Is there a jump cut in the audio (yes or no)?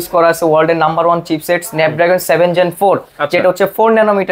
no